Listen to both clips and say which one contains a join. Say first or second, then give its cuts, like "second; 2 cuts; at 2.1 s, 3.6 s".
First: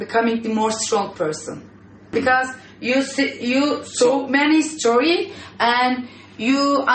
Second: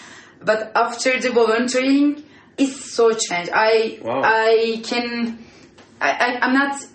first; 1 cut; at 2.1 s